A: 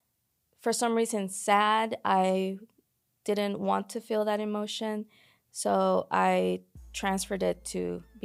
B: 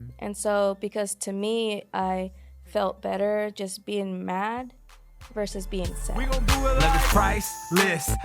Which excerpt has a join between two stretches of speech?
B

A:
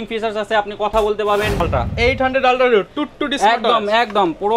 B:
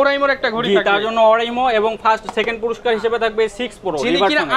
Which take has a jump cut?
A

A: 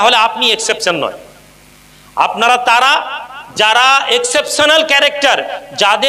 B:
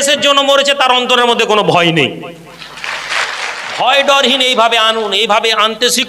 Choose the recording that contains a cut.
B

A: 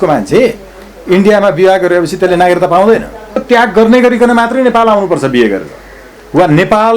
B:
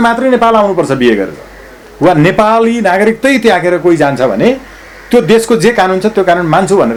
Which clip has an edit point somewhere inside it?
A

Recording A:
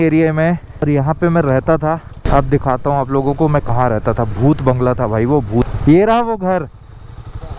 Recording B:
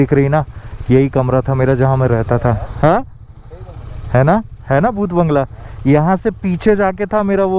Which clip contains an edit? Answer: A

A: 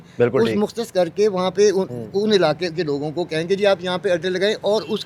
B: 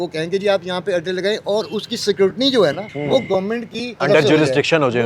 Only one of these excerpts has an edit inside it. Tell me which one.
B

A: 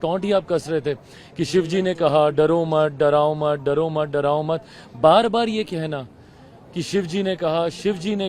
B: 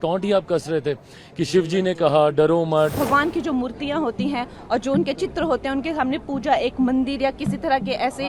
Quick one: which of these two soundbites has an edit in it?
B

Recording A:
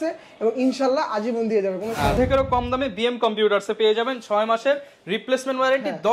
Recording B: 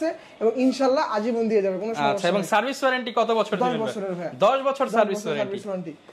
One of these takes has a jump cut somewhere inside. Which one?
A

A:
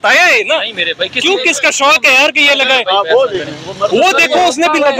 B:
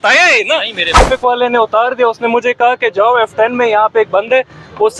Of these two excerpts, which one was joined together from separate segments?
B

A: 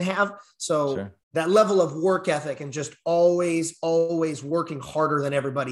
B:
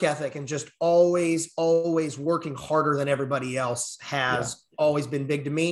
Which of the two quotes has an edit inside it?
A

